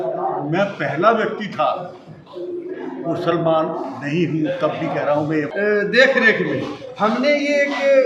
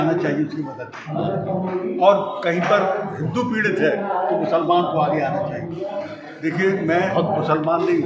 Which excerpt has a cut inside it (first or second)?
first